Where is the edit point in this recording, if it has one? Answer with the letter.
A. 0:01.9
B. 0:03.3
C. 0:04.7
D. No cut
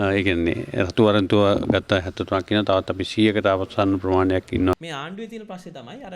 C